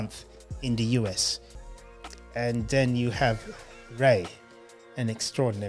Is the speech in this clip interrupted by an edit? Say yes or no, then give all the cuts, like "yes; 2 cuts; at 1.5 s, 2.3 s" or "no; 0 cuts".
yes; 1 cut; at 1.6 s